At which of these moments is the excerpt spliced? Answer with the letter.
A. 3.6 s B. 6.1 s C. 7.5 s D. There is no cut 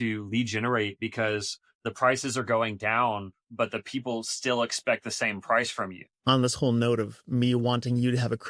B